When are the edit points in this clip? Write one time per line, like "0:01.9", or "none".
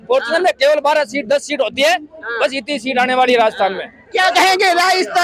none